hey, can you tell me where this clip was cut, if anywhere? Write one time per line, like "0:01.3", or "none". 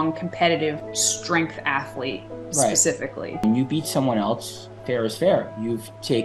0:03.4